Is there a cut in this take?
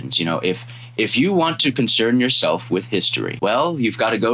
yes; 1 cut; at 3.2 s

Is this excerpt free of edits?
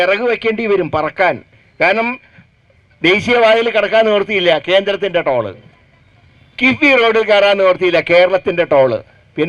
yes; 0 cuts

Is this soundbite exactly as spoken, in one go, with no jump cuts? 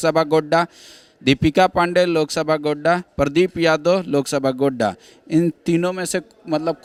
yes; 0 cuts

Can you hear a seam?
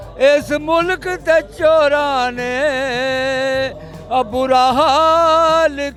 no; 0 cuts

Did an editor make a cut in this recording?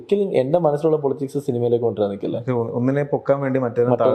no; 0 cuts

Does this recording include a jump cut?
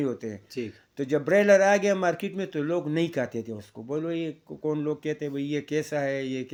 no; 0 cuts

